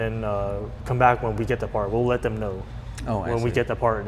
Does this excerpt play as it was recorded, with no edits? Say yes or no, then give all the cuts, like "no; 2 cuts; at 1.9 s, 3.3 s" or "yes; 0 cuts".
yes; 0 cuts